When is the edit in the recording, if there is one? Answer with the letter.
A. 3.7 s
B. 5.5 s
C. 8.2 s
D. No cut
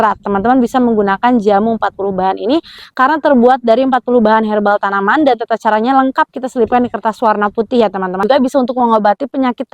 C